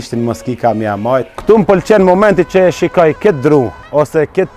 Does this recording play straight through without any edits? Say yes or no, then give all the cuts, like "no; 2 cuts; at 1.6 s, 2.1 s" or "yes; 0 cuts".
no; 1 cut; at 1.3 s